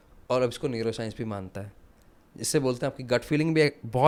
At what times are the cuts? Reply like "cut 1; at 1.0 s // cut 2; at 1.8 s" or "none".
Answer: none